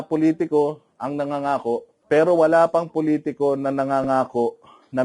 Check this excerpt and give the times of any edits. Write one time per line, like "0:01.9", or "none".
0:01.9